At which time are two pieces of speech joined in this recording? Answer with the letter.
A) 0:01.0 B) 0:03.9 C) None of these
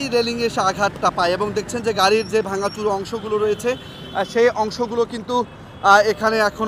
C